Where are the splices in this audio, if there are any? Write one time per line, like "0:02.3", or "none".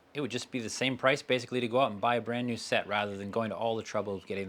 none